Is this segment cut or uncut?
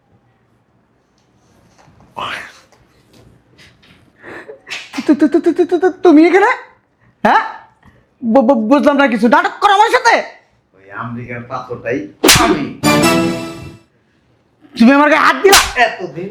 uncut